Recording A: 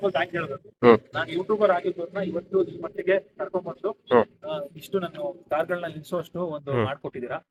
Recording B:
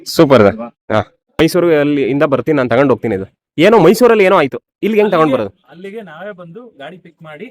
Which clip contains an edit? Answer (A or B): B